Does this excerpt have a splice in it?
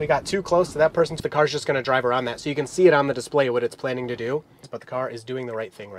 yes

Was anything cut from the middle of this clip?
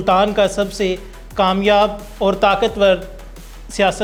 no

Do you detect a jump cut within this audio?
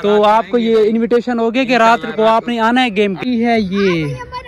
yes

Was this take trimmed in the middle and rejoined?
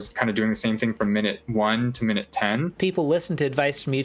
yes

